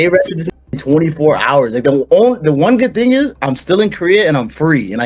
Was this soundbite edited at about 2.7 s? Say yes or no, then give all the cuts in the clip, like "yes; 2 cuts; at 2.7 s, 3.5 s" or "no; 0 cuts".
no; 0 cuts